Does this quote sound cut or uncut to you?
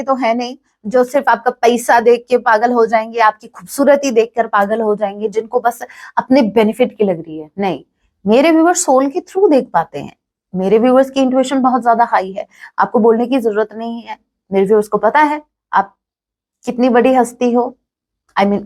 uncut